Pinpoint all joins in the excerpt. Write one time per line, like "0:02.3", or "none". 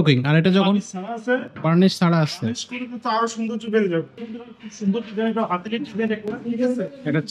0:04.2